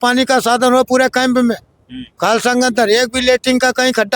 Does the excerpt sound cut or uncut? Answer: uncut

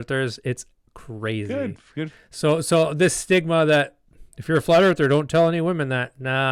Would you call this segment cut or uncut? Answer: uncut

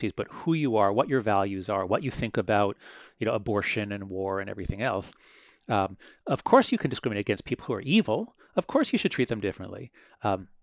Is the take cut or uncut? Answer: uncut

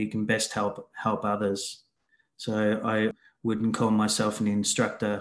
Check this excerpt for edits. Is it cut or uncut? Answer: cut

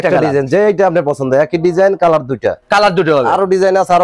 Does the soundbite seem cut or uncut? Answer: uncut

